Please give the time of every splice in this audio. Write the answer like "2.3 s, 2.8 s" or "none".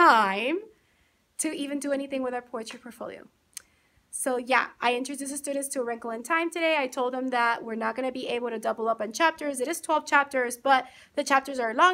none

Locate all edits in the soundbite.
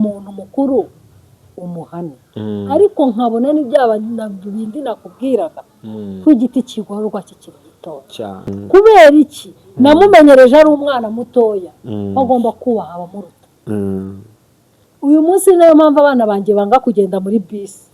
8.5 s

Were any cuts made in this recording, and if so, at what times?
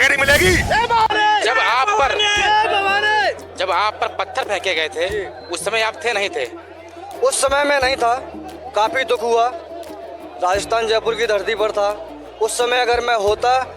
1.1 s

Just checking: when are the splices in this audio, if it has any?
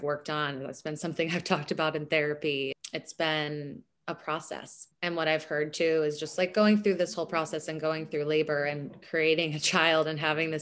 2.8 s, 4.8 s

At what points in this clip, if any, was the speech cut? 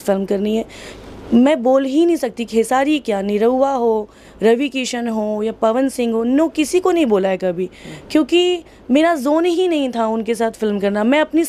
none

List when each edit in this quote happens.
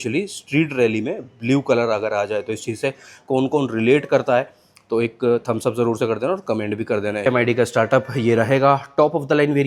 7.3 s

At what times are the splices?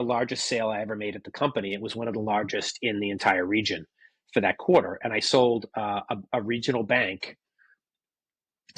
none

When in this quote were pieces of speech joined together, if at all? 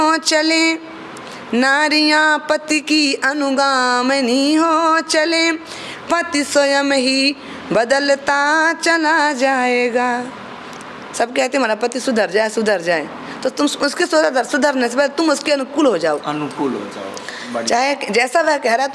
none

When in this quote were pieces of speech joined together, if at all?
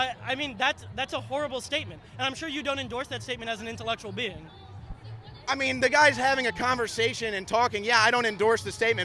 none

